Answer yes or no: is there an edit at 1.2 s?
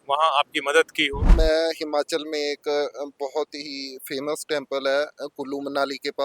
yes